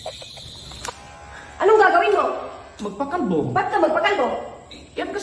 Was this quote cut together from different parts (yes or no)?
no